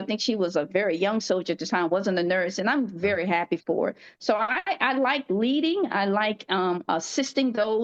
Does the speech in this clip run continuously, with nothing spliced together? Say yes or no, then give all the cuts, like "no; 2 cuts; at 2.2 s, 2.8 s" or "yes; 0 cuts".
yes; 0 cuts